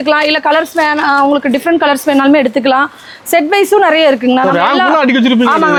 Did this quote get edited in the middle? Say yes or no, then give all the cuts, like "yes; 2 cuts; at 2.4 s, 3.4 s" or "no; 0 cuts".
no; 0 cuts